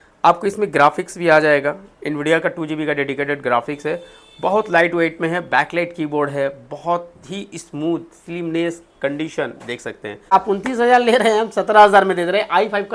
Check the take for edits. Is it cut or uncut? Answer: cut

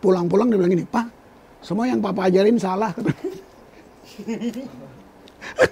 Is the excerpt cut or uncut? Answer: uncut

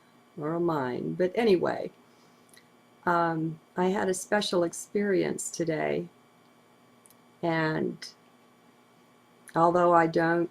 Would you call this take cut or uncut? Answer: cut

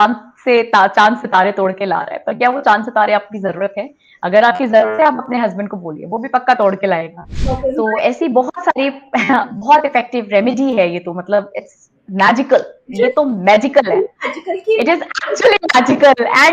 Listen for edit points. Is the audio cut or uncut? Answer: cut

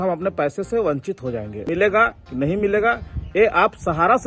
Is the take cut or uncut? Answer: cut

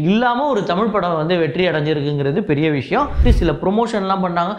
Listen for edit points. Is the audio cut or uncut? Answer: cut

